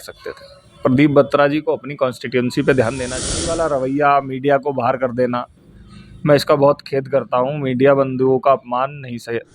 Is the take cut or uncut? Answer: cut